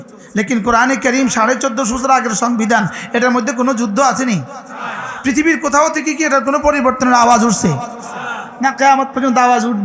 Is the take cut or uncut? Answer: uncut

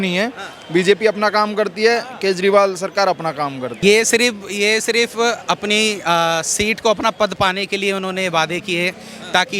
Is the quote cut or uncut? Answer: cut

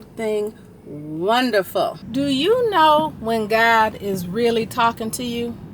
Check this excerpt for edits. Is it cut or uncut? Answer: cut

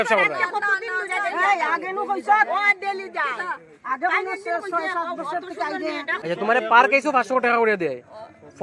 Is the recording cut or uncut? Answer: cut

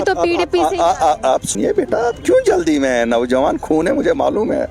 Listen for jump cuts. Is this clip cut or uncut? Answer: cut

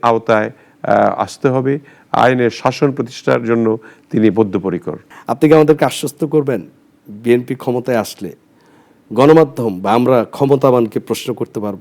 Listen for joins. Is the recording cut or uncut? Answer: uncut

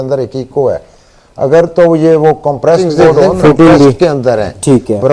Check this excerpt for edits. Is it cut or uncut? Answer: cut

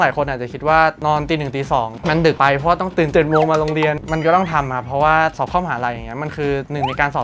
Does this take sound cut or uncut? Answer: cut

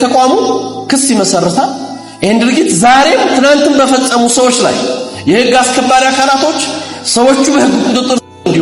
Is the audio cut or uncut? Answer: uncut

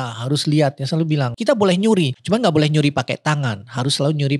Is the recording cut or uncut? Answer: cut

